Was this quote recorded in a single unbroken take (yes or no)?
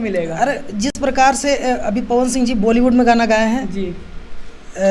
yes